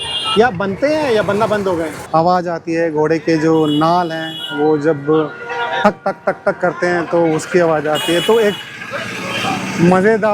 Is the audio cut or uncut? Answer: cut